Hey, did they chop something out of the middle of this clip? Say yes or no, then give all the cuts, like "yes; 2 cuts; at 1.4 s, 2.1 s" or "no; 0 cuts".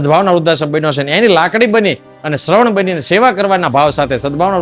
no; 0 cuts